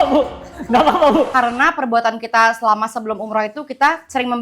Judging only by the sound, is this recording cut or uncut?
cut